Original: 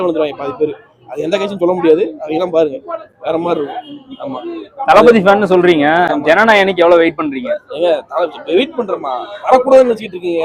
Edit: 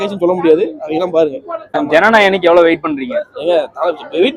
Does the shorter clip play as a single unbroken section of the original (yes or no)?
no